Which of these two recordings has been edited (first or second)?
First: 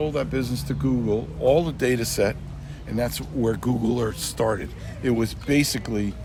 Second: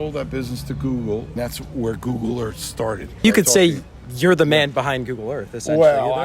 second